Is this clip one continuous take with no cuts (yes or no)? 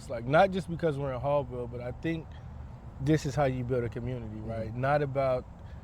yes